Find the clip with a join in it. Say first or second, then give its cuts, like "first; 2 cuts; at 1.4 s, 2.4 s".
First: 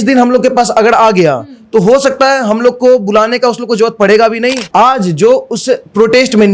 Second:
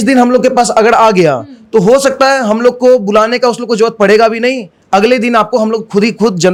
first; 1 cut; at 4.6 s